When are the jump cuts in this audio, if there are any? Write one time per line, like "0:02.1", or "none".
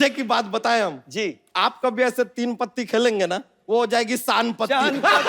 0:01.0
0:03.5